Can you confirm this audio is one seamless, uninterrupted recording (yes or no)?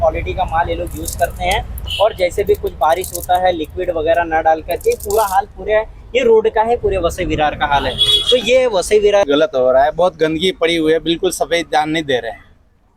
no